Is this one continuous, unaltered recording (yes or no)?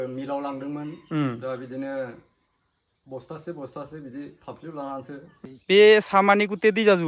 no